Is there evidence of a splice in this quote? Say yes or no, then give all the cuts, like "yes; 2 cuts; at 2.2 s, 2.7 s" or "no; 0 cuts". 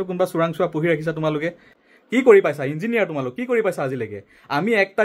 yes; 1 cut; at 1.6 s